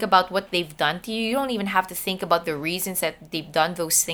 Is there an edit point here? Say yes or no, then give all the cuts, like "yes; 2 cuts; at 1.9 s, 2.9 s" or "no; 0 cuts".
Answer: no; 0 cuts